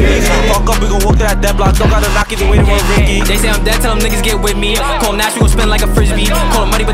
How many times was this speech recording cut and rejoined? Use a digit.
0